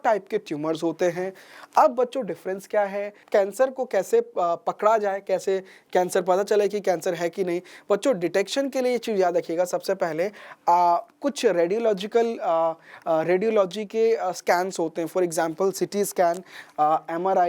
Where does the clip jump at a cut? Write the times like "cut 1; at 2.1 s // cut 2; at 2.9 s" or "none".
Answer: cut 1; at 3.2 s